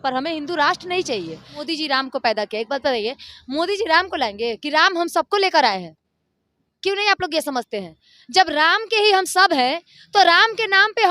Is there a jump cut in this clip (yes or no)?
yes